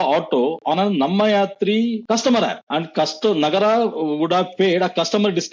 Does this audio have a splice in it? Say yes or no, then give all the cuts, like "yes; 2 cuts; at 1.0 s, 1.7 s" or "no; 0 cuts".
yes; 2 cuts; at 2.0 s, 2.6 s